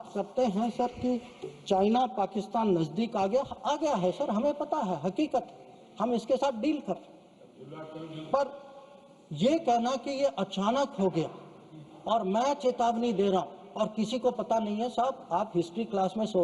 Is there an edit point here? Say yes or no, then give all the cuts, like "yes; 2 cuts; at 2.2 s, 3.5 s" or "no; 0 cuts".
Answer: no; 0 cuts